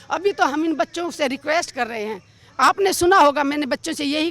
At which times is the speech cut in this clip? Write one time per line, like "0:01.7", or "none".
none